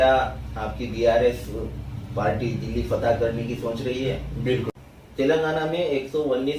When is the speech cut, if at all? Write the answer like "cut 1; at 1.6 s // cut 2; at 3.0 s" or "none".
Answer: cut 1; at 4.7 s